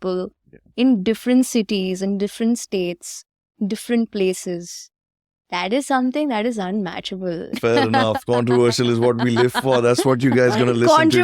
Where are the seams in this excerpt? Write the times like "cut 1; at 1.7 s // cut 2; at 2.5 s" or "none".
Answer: cut 1; at 7.6 s